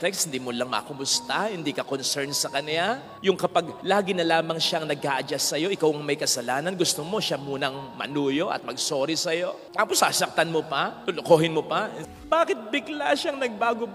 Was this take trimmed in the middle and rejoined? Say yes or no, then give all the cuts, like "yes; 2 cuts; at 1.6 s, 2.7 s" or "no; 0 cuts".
yes; 1 cut; at 12.1 s